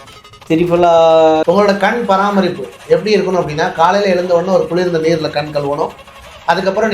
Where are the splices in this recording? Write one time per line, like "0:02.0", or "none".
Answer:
0:01.4